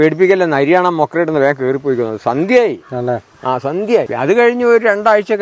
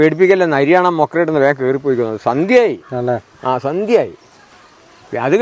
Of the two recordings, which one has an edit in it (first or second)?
first